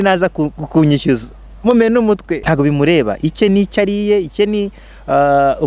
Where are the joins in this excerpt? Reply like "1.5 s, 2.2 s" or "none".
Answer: 2.4 s